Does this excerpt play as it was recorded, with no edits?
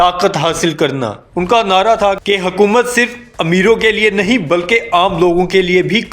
no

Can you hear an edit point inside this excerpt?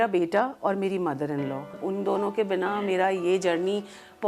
no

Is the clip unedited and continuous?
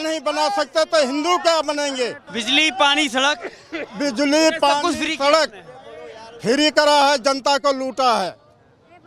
yes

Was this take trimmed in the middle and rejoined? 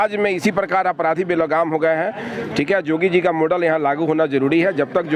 no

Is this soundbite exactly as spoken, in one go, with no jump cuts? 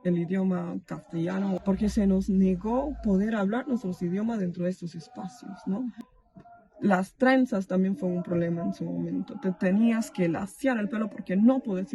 no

